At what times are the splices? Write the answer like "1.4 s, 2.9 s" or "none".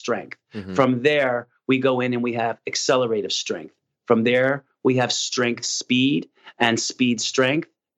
none